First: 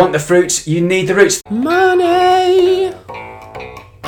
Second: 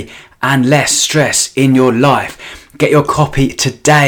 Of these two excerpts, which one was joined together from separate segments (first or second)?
first